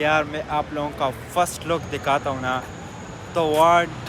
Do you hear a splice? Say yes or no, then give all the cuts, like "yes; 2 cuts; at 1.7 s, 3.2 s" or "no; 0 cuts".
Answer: no; 0 cuts